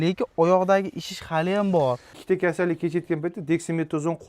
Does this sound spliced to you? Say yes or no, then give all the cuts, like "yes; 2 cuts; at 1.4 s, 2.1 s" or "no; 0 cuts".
yes; 1 cut; at 2.1 s